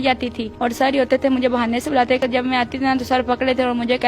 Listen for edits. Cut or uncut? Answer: cut